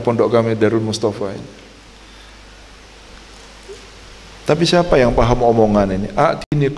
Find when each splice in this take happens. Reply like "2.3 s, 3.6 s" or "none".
1.7 s